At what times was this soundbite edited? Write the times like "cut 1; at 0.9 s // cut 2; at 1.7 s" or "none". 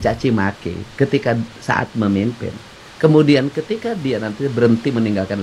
none